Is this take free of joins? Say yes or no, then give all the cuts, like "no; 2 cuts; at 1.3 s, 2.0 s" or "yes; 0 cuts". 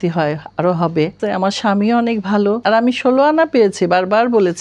no; 2 cuts; at 1.2 s, 2.6 s